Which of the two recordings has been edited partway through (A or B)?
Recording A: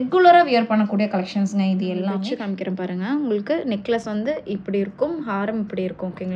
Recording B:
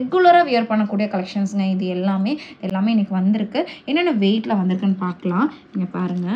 A